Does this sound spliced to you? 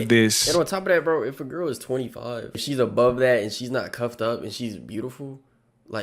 yes; 1 cut; at 2.6 s

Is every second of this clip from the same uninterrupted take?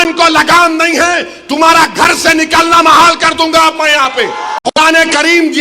no; 1 cut; at 4.6 s

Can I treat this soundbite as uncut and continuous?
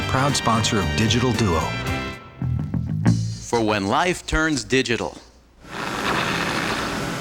no; 1 cut; at 2.4 s

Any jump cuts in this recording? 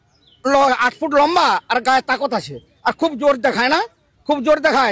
no; 0 cuts

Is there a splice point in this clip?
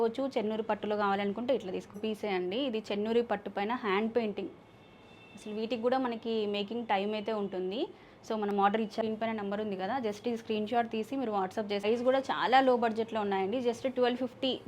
yes; 3 cuts; at 2.0 s, 9.0 s, 11.8 s

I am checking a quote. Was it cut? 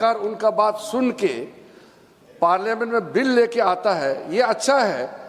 no; 0 cuts

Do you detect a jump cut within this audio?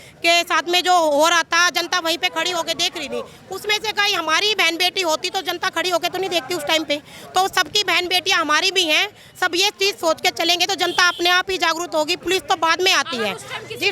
no; 0 cuts

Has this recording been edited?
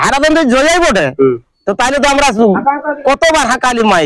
no; 0 cuts

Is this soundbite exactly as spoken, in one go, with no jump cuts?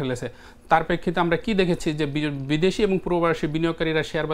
yes; 0 cuts

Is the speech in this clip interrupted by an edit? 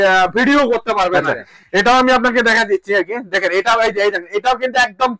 yes; 1 cut; at 1.2 s

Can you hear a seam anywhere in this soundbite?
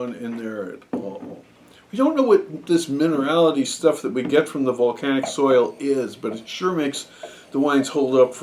no; 0 cuts

